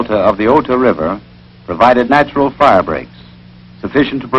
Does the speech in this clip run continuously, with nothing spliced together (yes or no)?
no